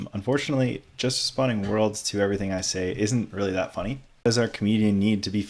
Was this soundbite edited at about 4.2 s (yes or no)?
yes